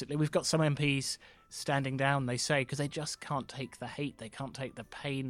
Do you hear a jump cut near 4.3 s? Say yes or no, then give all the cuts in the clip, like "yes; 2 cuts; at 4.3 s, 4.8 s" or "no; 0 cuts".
no; 0 cuts